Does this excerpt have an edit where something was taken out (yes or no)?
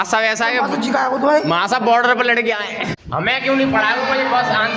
yes